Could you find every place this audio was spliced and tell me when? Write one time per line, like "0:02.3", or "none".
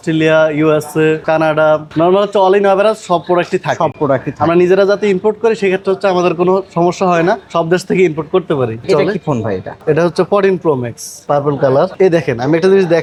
none